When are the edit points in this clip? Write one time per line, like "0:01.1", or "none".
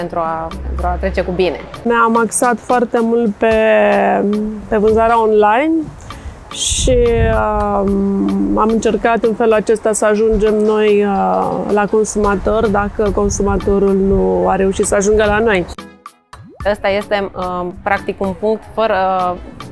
0:01.9
0:16.0